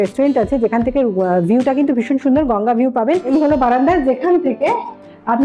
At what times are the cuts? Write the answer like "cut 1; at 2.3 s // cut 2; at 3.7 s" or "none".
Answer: cut 1; at 3.2 s